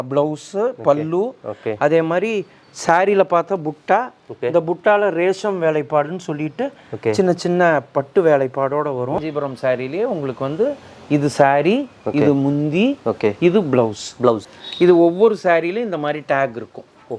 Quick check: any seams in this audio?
yes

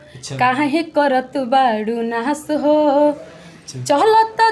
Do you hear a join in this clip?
no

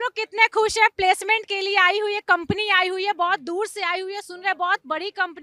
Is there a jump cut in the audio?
no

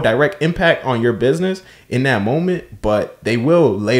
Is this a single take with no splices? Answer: yes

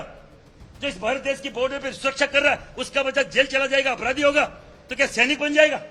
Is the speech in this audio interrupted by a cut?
no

